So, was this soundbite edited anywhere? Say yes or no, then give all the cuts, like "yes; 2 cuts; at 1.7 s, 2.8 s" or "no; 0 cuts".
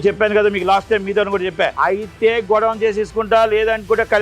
yes; 1 cut; at 1.7 s